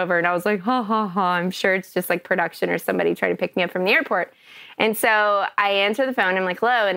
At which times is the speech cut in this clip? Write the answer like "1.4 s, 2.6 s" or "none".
3.5 s